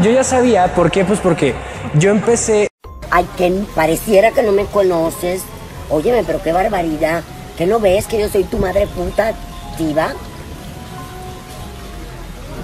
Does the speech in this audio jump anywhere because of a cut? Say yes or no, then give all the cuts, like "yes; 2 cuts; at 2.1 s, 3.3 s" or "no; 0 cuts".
yes; 1 cut; at 2.8 s